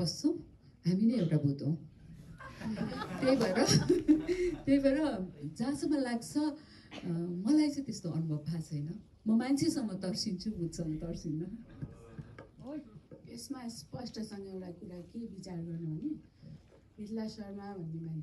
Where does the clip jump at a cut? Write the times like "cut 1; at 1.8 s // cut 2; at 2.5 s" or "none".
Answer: none